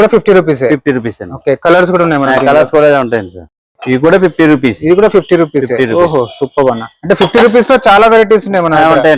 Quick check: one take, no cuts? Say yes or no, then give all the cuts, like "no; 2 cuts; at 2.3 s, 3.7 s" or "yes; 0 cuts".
yes; 0 cuts